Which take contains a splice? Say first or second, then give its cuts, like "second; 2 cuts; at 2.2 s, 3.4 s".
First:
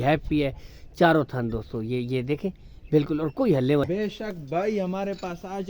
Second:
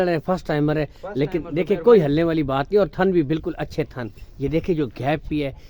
first; 1 cut; at 3.9 s